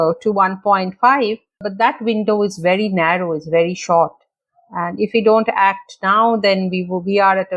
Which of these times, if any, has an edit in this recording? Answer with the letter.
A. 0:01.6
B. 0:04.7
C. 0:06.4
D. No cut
A